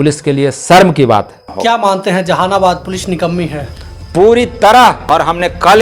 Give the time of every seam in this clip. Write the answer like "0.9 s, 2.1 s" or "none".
1.5 s, 5.0 s